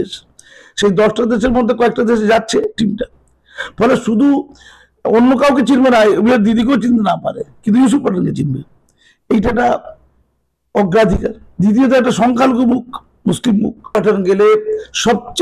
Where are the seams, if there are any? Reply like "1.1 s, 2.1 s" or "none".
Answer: 13.9 s